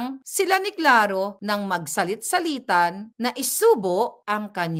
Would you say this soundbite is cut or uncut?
uncut